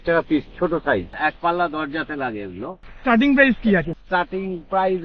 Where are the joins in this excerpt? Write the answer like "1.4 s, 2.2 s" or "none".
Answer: 1.2 s, 2.8 s, 4.0 s